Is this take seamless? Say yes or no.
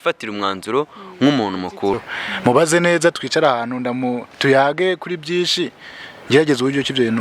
no